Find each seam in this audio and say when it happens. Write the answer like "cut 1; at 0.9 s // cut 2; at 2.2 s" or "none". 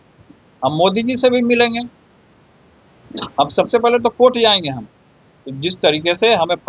none